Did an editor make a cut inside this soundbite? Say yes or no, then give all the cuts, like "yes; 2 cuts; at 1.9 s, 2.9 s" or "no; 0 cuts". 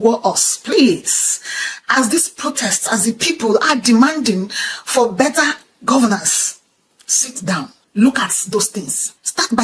no; 0 cuts